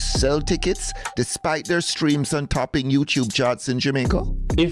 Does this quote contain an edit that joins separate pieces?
no; 0 cuts

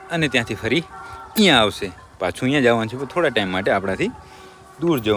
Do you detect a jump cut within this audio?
no; 0 cuts

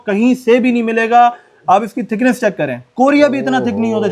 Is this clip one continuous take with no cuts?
yes; 0 cuts

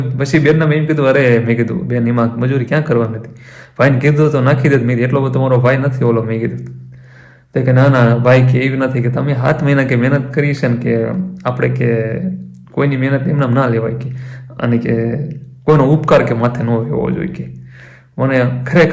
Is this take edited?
no; 0 cuts

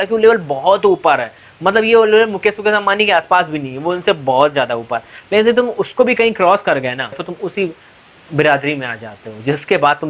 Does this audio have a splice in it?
yes; 1 cut; at 7.3 s

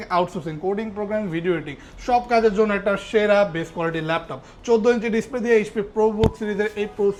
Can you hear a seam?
no; 0 cuts

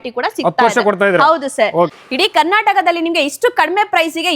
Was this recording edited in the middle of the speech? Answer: yes; 1 cut; at 2.0 s

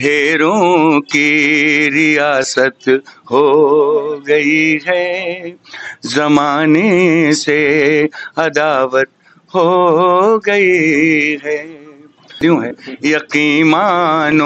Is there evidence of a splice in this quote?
yes; 1 cut; at 12.4 s

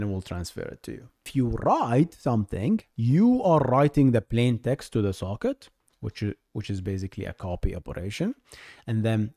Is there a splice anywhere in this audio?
yes; 2 cuts; at 1.3 s, 2.9 s

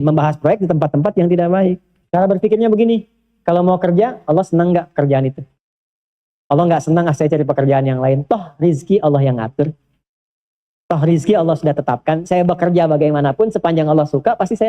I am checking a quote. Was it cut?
yes; 1 cut; at 2.0 s

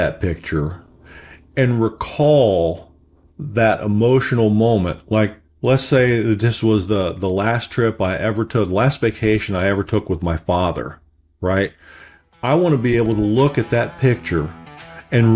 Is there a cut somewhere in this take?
no; 0 cuts

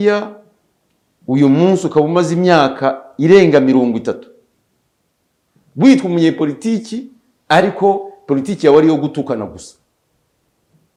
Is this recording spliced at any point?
no; 0 cuts

